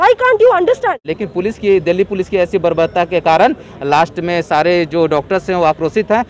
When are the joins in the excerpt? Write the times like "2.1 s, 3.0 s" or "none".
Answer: 1.0 s